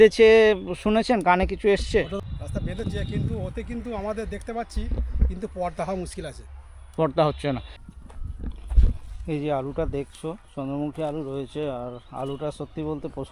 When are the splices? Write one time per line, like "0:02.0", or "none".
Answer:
0:02.1
0:07.7